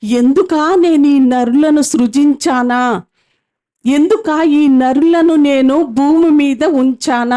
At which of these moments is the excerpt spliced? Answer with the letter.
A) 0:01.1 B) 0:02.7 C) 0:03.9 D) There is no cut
D